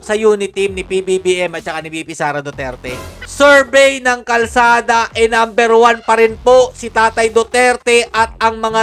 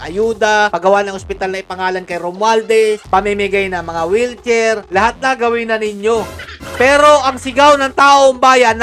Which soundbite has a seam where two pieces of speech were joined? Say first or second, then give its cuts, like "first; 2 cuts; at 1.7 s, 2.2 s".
first; 1 cut; at 3.2 s